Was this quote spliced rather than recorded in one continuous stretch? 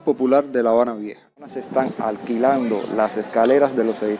yes; 1 cut; at 1.6 s

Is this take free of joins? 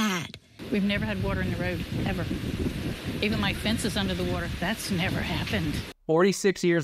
no; 1 cut; at 5.9 s

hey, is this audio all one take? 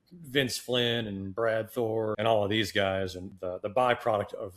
no; 2 cuts; at 2.1 s, 3.3 s

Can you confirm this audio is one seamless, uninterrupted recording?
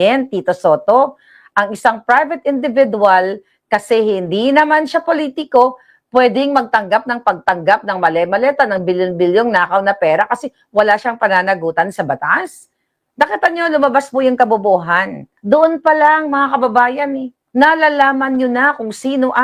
no; 2 cuts; at 15.3 s, 17.3 s

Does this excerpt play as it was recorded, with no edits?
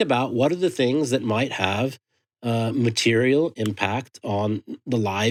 yes; 0 cuts

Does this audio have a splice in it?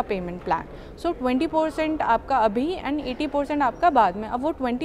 no; 0 cuts

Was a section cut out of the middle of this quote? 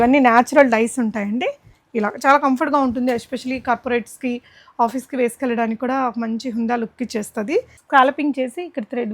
yes; 1 cut; at 7.8 s

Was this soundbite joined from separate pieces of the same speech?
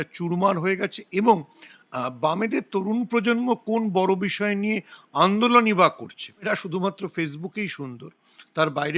yes; 1 cut; at 6.5 s

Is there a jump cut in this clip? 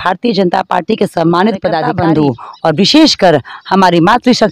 yes; 1 cut; at 1.9 s

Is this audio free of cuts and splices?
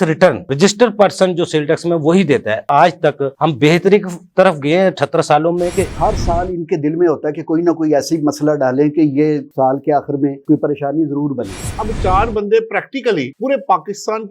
no; 3 cuts; at 2.7 s, 5.9 s, 11.7 s

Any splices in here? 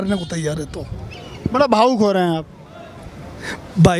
no; 0 cuts

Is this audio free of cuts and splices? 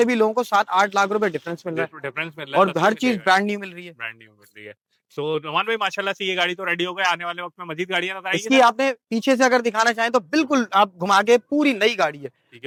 yes; 0 cuts

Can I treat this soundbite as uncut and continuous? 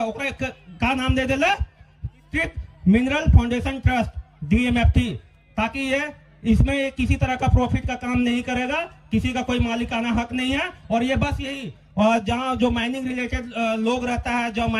yes; 0 cuts

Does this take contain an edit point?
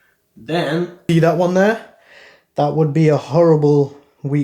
yes; 1 cut; at 1.0 s

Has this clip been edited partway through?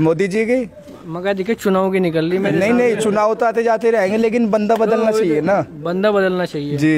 no; 0 cuts

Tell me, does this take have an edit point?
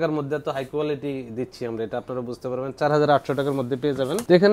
no; 0 cuts

